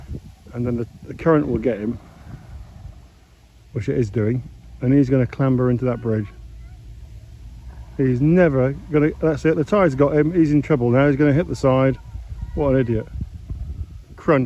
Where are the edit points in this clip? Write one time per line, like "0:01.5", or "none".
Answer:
none